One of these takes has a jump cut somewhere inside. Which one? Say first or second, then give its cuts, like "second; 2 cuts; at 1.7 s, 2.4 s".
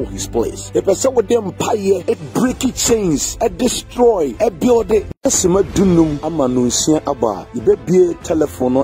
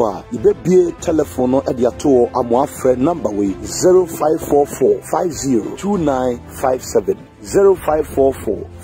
first; 1 cut; at 5.1 s